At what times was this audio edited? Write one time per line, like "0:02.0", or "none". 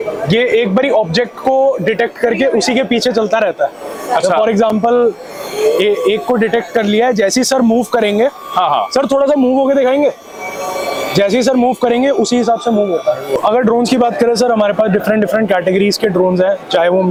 none